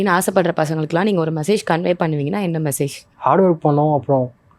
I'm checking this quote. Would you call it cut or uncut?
uncut